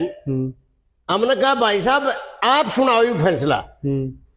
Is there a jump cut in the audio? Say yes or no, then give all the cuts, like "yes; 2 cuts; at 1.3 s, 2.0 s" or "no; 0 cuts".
no; 0 cuts